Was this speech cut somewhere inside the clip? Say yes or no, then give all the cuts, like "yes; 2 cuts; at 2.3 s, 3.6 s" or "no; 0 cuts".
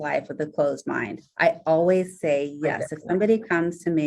yes; 1 cut; at 1.2 s